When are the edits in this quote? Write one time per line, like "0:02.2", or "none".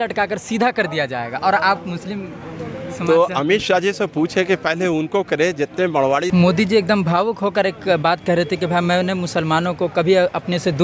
0:06.3